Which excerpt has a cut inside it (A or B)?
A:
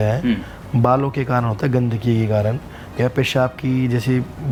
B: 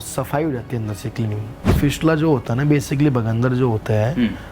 B